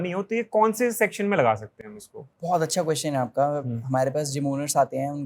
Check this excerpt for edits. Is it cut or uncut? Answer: uncut